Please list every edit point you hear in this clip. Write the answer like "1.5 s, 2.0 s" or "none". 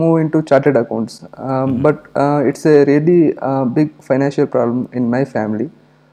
none